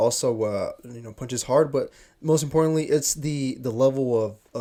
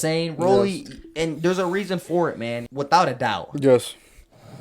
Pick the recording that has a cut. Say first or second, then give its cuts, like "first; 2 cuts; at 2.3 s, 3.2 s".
second; 1 cut; at 2.6 s